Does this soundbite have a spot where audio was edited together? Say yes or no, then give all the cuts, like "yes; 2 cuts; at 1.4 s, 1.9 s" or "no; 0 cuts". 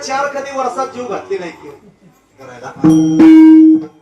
yes; 1 cut; at 2.5 s